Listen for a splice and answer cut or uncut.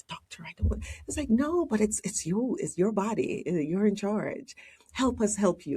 cut